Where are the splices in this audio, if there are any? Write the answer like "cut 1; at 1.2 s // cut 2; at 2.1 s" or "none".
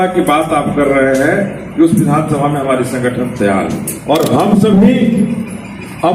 cut 1; at 3.9 s